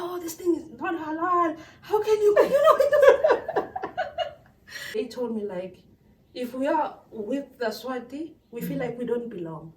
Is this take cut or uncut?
cut